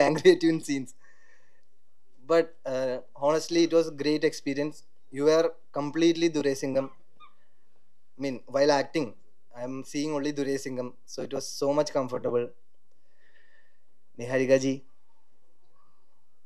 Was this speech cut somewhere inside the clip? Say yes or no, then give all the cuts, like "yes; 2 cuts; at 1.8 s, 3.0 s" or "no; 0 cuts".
no; 0 cuts